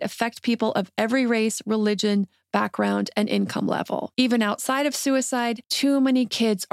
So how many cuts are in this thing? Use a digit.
2